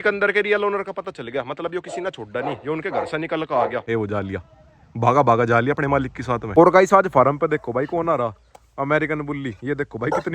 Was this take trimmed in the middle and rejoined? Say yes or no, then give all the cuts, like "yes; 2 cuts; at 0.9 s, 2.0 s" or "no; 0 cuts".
yes; 2 cuts; at 3.8 s, 6.5 s